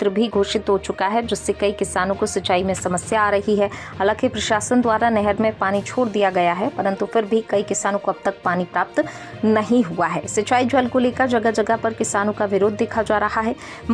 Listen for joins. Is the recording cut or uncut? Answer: uncut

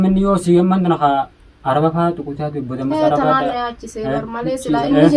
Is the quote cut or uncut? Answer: uncut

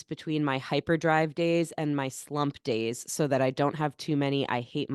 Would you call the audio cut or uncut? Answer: uncut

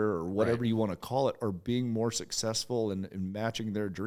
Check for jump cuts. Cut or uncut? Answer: uncut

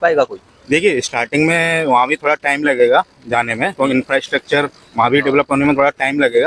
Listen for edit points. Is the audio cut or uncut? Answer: uncut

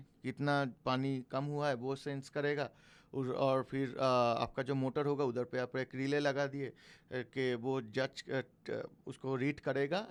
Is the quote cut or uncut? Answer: uncut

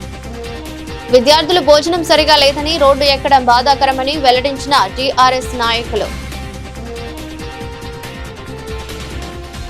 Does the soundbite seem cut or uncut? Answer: uncut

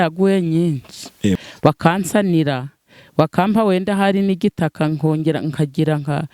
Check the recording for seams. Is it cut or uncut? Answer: cut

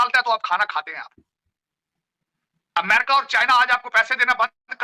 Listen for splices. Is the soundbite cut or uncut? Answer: uncut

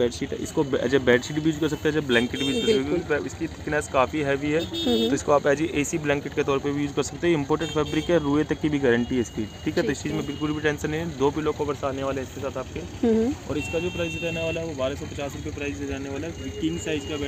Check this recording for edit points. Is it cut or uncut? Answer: uncut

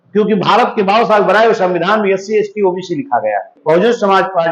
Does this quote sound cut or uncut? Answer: cut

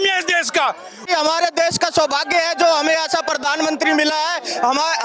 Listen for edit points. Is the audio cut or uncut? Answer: cut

